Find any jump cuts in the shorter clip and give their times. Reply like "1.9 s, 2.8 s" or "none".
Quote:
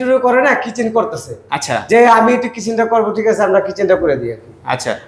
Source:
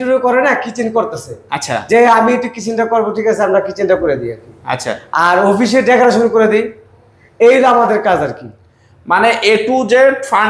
none